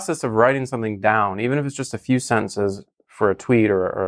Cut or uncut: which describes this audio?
uncut